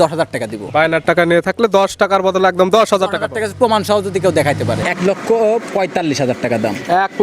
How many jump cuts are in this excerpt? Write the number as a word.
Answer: one